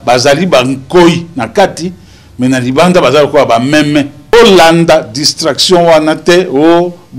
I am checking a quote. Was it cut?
yes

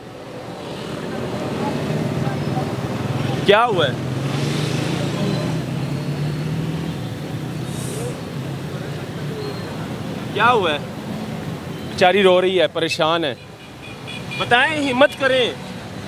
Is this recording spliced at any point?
no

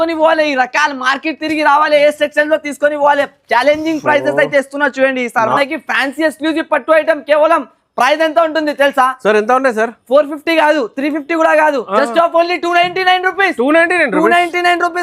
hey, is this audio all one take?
no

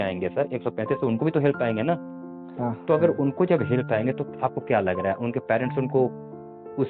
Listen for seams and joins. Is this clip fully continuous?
yes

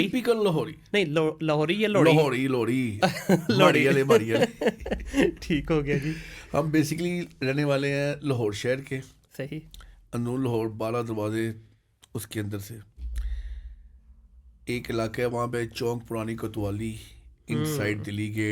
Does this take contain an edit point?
no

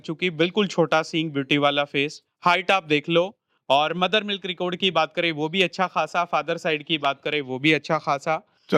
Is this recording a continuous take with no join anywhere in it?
yes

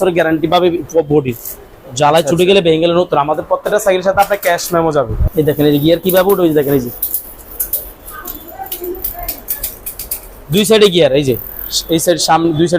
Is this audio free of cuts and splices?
no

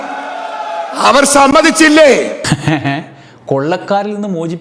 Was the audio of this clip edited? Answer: yes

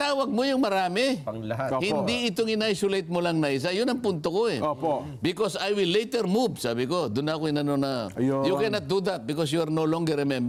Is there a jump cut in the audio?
no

